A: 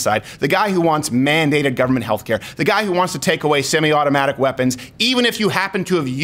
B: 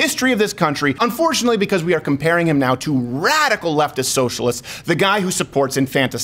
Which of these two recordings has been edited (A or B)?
B